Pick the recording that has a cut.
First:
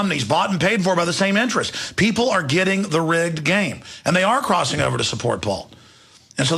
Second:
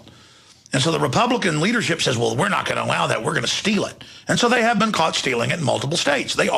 second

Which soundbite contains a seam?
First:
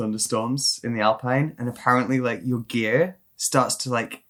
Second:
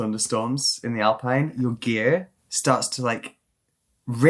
second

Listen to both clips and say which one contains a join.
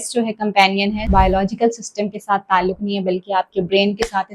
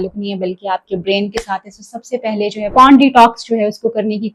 first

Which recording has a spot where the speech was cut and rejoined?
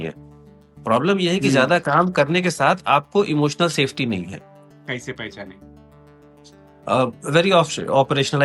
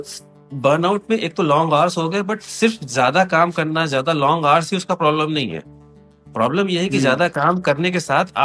first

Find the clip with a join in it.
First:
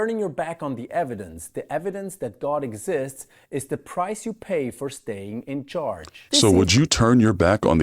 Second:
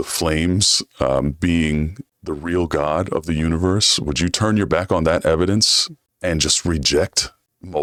first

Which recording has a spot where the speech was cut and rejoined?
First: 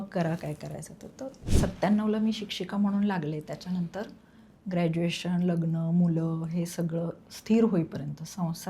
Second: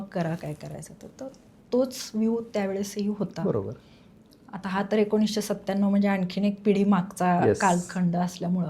first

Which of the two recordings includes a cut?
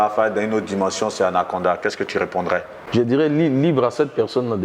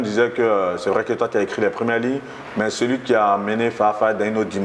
first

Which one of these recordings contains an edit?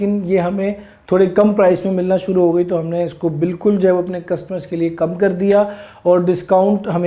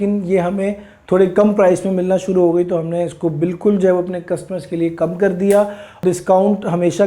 second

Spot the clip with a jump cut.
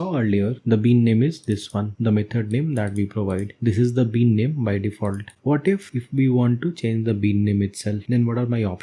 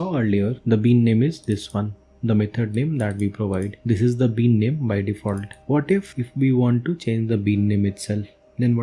first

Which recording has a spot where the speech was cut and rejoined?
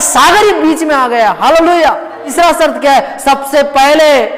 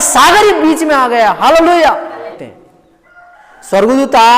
second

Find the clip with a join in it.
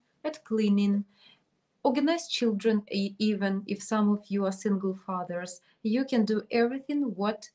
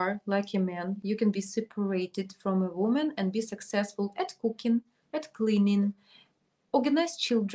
second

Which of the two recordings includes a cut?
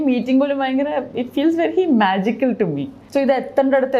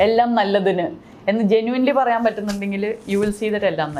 first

